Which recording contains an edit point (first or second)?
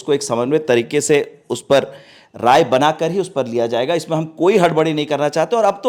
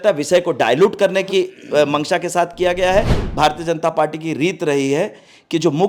second